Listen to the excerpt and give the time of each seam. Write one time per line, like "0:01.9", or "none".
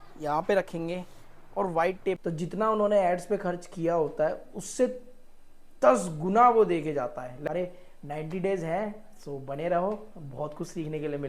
0:02.2
0:07.5